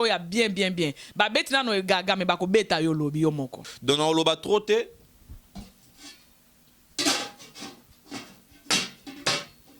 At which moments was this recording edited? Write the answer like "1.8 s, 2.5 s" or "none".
3.7 s